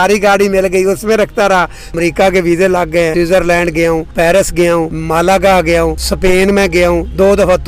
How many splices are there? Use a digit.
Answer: 5